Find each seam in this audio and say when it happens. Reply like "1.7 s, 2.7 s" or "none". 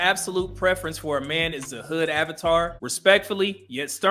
2.8 s